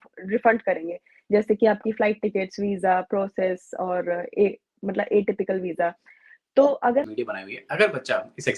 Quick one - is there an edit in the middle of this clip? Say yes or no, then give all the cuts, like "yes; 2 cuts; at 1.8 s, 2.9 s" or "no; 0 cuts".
yes; 1 cut; at 7.1 s